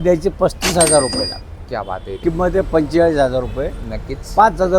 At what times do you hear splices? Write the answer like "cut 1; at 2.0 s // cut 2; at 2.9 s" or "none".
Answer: cut 1; at 2.2 s